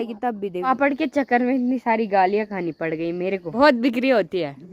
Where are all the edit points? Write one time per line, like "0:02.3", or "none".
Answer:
0:00.7
0:03.5